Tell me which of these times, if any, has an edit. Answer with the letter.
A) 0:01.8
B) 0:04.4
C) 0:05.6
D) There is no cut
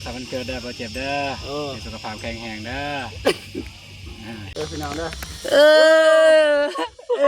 B